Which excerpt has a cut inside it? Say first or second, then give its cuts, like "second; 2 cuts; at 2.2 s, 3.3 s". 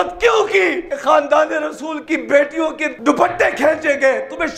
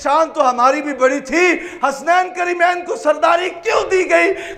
first; 3 cuts; at 0.9 s, 1.9 s, 2.9 s